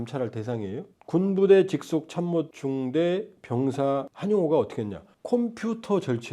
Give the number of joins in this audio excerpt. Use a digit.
1